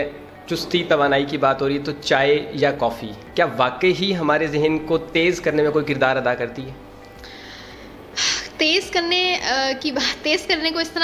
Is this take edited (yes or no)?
no